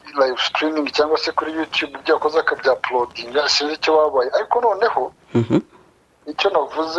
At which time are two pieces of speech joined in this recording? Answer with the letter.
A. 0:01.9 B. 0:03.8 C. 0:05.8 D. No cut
D